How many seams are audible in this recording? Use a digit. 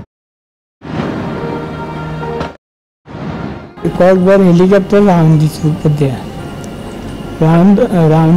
1